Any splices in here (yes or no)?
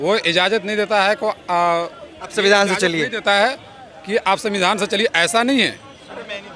no